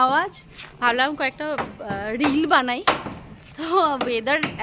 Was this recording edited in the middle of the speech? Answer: no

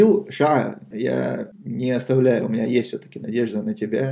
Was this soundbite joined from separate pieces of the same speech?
yes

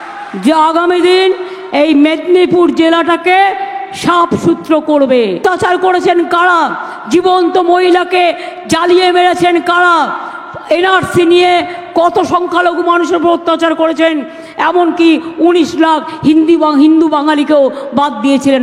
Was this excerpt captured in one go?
no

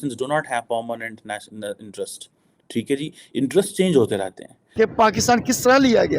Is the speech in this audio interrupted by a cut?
yes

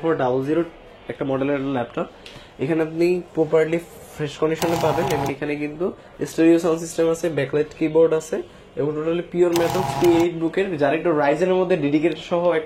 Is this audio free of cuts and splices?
no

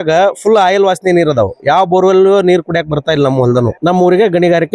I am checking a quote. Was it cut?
yes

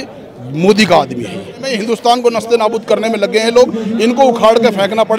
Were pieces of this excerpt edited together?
yes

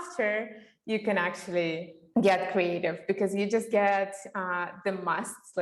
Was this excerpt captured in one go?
no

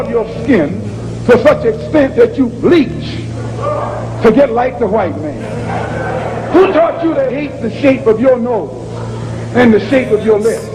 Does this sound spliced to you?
no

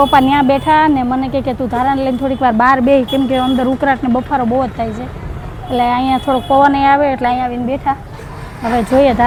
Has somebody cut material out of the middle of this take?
no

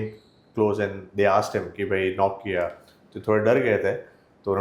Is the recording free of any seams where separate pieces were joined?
yes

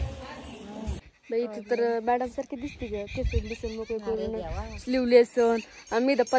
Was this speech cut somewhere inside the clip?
yes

